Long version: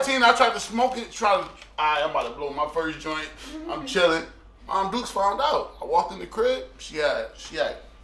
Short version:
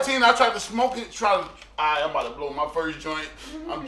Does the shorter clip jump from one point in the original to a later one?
no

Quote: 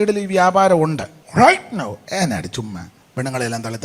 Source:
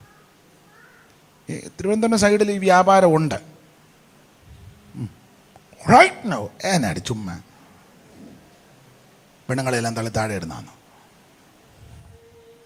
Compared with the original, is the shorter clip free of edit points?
no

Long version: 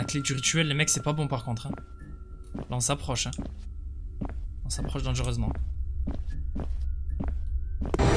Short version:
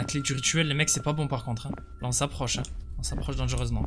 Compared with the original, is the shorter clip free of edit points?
no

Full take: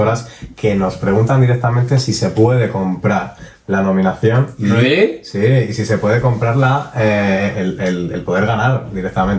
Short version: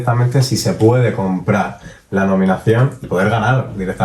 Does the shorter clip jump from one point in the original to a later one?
yes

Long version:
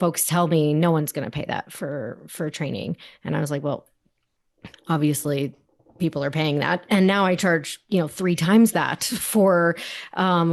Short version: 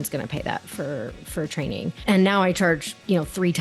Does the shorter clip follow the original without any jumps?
no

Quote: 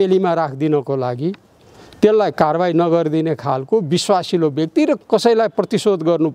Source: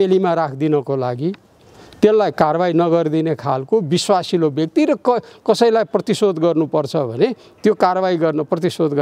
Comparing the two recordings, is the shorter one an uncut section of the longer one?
no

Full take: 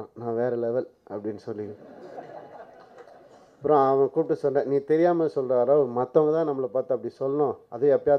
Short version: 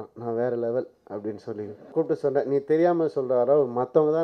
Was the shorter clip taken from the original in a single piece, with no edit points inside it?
no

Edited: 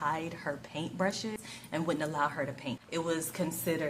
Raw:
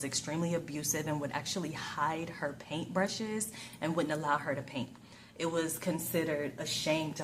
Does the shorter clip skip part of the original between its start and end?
yes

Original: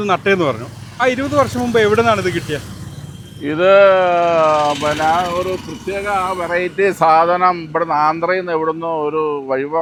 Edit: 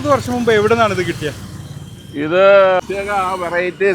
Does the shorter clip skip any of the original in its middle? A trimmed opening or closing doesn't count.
yes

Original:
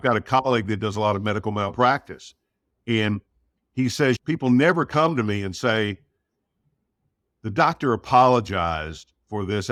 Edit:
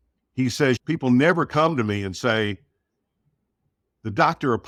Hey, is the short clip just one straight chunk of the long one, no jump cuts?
yes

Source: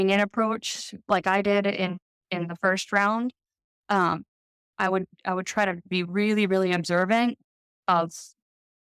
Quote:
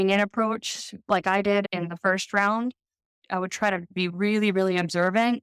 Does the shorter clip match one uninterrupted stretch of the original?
no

